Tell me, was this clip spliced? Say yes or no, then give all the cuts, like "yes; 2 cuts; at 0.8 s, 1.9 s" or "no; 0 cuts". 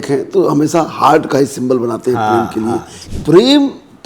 yes; 1 cut; at 3.0 s